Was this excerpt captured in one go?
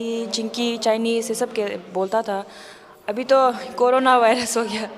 yes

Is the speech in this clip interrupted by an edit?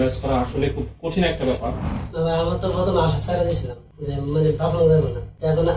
yes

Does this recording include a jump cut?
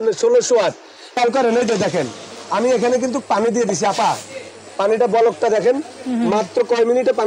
yes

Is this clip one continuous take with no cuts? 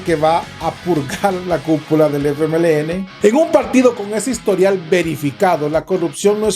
no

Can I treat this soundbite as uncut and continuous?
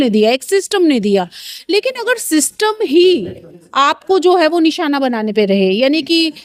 yes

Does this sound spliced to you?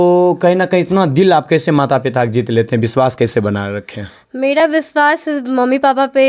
no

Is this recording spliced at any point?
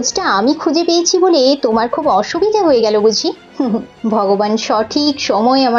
no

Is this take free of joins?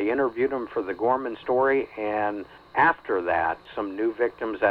no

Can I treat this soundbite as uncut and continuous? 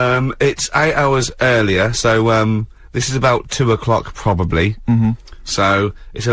yes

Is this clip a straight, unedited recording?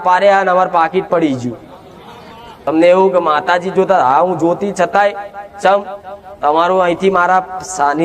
no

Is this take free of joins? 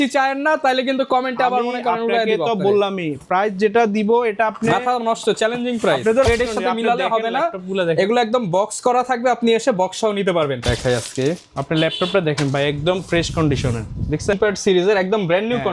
no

